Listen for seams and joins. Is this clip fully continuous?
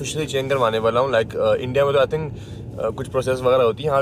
yes; 0 cuts

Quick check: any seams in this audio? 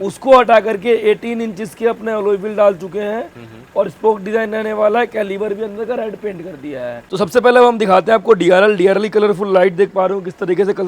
yes; 1 cut; at 7.0 s

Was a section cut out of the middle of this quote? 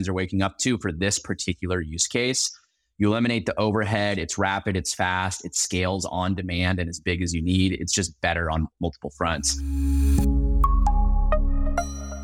yes; 1 cut; at 9.6 s

